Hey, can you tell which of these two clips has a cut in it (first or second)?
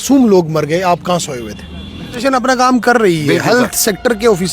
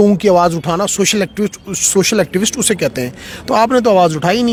first